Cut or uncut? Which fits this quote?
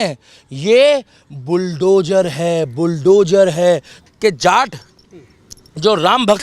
cut